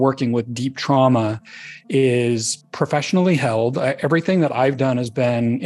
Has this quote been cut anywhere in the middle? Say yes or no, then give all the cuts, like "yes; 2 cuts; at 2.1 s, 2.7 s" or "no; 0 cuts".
yes; 1 cut; at 2.6 s